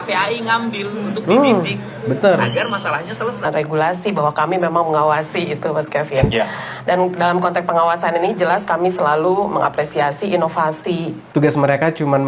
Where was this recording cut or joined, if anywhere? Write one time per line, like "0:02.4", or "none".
0:03.5
0:11.3